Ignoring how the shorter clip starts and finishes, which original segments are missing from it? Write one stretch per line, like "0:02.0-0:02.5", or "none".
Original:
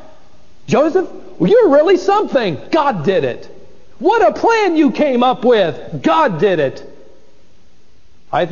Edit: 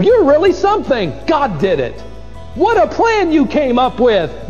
none